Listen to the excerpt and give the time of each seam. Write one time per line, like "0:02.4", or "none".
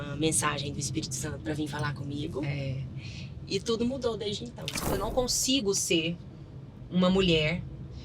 0:04.9